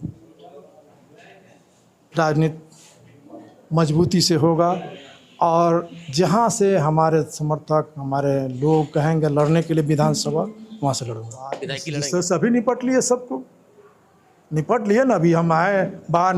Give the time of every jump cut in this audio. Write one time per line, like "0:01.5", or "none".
0:11.7

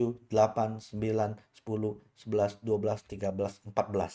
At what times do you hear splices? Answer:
none

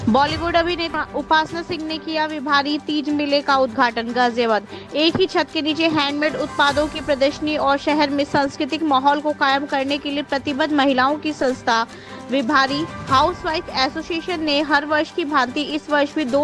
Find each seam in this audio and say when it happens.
none

